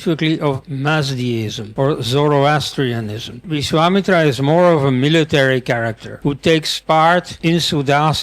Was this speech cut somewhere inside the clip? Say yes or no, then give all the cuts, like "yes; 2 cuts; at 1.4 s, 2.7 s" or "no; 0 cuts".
yes; 4 cuts; at 1.6 s, 3.5 s, 6.0 s, 7.3 s